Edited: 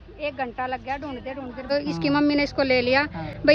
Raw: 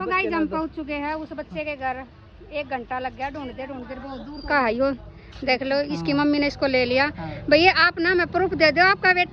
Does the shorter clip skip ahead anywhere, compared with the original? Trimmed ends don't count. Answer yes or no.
yes